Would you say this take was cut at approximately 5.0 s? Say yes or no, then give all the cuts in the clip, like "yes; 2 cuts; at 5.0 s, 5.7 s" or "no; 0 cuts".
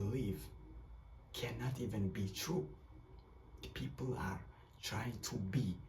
no; 1 cut; at 3.7 s